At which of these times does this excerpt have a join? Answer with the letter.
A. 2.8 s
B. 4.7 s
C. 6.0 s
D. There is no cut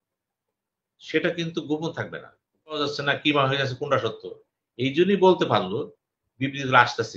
A